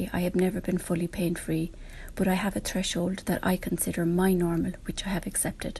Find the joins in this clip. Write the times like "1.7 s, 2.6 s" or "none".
none